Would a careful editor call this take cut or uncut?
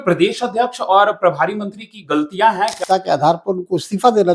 cut